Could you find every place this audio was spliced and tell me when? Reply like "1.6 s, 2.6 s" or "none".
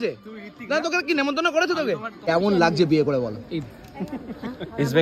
2.1 s